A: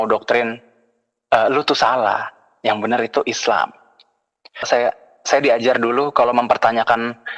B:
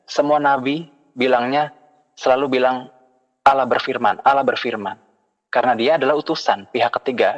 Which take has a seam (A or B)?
A